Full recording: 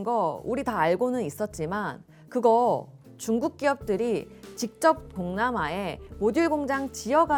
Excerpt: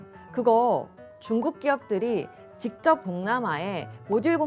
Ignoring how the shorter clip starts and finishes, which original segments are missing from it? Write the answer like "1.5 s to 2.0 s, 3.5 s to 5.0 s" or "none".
5.1 s to 5.2 s